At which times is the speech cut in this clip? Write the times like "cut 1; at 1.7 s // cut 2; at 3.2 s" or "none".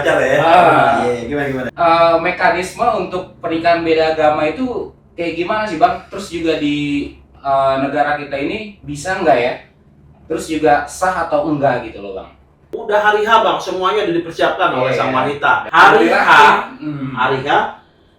cut 1; at 1.6 s // cut 2; at 12.7 s // cut 3; at 15.6 s